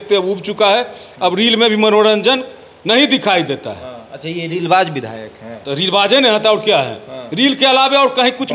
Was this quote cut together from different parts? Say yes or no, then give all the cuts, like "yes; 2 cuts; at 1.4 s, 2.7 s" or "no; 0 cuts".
no; 0 cuts